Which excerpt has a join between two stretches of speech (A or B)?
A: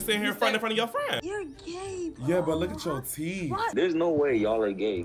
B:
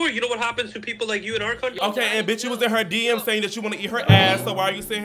A